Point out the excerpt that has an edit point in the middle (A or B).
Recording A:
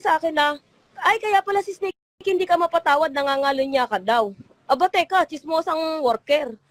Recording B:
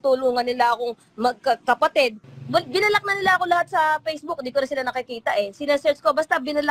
B